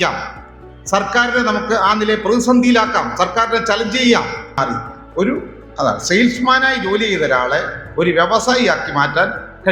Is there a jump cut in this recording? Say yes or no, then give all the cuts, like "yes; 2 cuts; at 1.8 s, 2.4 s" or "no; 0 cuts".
yes; 1 cut; at 4.6 s